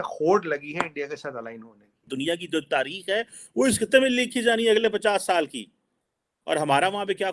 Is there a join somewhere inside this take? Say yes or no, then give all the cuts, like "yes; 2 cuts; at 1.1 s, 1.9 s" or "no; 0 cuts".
yes; 1 cut; at 2.0 s